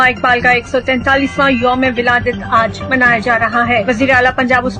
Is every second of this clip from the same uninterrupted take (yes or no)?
yes